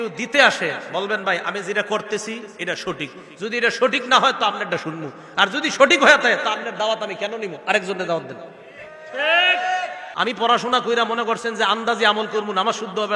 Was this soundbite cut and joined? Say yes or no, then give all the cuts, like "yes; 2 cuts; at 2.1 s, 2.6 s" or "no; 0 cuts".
yes; 1 cut; at 10.0 s